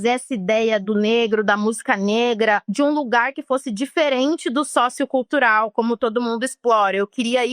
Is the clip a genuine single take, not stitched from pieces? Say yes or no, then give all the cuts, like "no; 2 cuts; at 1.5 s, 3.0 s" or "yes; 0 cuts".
no; 1 cut; at 2.7 s